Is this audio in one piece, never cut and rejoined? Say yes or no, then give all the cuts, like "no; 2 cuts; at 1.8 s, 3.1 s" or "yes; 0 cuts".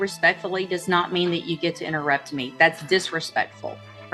yes; 0 cuts